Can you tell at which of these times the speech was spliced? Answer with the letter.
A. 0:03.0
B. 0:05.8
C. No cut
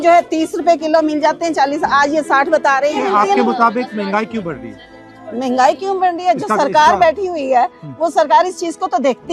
C